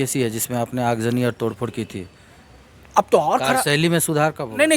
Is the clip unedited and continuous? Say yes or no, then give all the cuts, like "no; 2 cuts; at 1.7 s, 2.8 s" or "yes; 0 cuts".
yes; 0 cuts